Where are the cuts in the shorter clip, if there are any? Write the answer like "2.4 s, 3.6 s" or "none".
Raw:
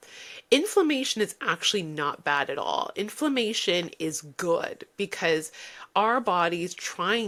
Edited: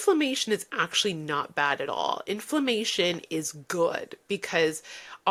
none